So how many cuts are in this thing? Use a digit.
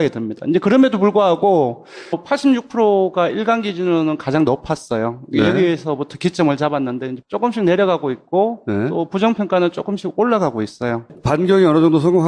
0